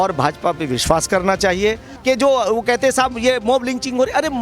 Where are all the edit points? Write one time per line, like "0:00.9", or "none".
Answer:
0:01.9

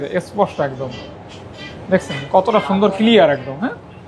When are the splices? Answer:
none

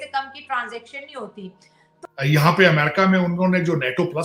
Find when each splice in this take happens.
0:01.9

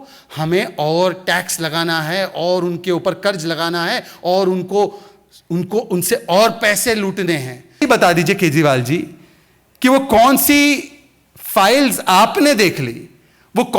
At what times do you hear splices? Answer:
0:07.8

